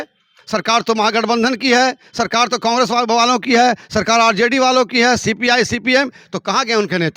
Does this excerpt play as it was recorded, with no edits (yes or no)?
yes